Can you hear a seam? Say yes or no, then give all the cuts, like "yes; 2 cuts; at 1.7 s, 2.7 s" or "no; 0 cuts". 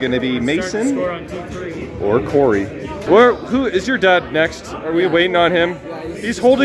yes; 1 cut; at 3.0 s